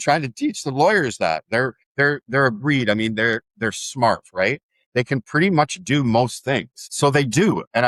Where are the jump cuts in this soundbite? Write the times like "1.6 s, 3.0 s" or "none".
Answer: none